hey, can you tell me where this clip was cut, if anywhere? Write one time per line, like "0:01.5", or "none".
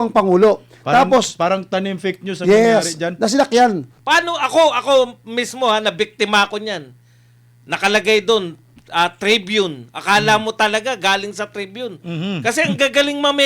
0:03.9